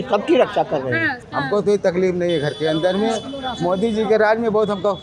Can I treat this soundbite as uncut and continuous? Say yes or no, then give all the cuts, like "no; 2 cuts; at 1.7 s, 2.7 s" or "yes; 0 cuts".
no; 1 cut; at 1.2 s